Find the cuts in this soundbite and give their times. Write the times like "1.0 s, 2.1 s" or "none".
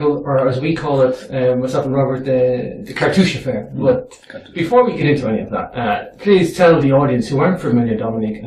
3.8 s

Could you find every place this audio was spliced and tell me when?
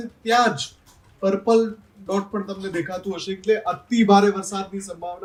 none

